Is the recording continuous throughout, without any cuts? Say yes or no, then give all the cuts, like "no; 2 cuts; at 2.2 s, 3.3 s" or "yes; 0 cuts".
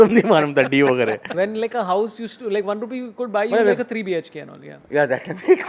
no; 1 cut; at 1.2 s